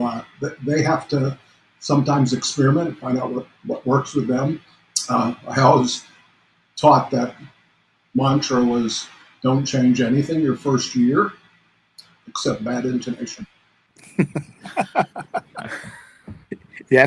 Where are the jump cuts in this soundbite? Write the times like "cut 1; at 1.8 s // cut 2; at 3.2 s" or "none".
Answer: none